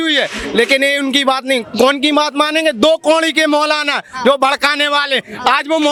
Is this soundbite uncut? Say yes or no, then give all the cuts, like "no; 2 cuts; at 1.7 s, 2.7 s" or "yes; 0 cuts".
yes; 0 cuts